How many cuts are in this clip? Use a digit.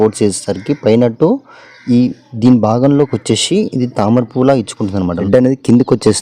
1